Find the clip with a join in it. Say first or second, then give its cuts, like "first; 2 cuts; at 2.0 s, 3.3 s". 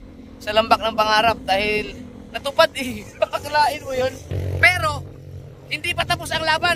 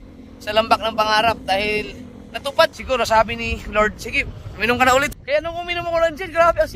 second; 2 cuts; at 2.8 s, 5.1 s